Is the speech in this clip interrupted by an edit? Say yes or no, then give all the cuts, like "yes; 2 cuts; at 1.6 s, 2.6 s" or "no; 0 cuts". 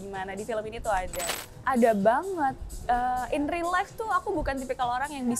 yes; 1 cut; at 1.3 s